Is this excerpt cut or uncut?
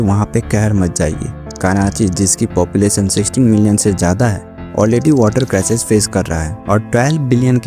cut